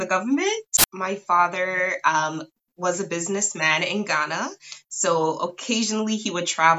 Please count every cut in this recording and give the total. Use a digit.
1